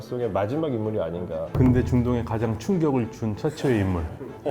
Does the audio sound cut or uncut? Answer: cut